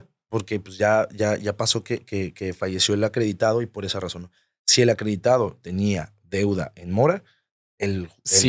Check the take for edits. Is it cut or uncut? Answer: uncut